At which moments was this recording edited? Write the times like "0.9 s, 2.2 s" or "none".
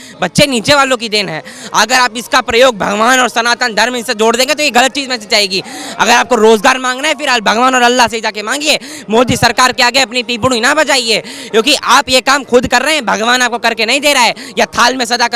none